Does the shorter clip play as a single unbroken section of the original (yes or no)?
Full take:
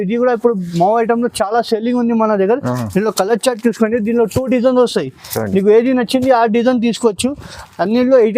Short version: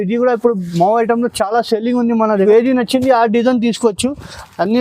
no